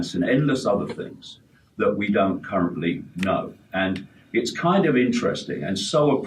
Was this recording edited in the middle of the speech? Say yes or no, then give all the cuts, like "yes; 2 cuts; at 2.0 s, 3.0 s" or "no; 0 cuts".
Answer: no; 0 cuts